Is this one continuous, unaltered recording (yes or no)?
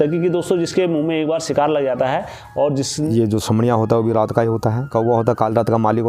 no